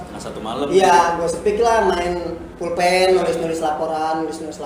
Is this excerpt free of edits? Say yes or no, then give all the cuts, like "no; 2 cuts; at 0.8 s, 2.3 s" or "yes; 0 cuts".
yes; 0 cuts